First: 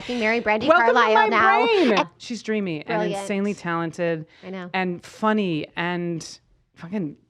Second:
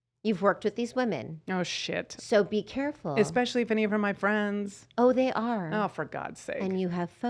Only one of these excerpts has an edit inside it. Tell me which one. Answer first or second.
first